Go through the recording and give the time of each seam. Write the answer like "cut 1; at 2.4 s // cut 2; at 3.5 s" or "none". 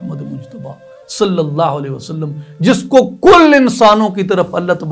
none